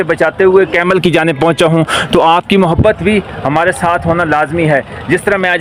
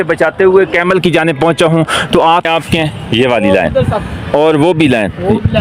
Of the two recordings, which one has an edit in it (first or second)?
second